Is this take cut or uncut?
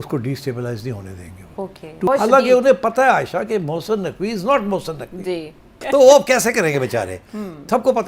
cut